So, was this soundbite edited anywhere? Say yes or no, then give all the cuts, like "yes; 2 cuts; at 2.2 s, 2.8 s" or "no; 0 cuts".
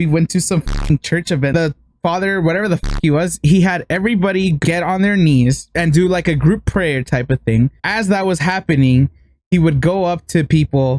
yes; 4 cuts; at 1.5 s, 4.6 s, 5.8 s, 7.8 s